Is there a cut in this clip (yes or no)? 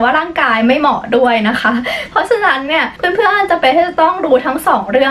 yes